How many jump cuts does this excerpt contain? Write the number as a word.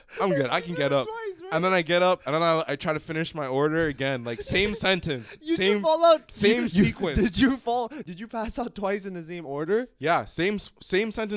one